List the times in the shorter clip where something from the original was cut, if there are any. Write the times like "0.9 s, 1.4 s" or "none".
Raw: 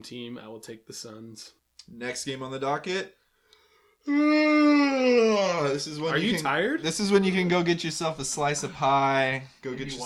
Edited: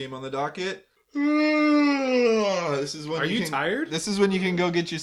0.9 s